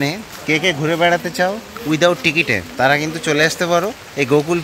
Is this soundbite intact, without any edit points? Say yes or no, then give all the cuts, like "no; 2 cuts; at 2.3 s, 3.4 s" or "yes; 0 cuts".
yes; 0 cuts